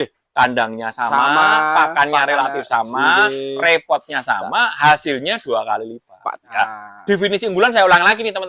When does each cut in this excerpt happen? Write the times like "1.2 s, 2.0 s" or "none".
6.3 s